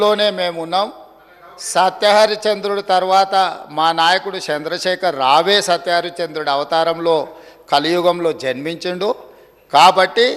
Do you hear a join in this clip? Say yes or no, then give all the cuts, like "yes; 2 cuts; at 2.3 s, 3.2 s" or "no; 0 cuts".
no; 0 cuts